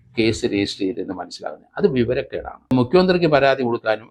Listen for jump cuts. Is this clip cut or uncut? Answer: cut